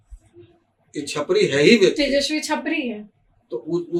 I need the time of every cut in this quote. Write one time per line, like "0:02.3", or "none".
none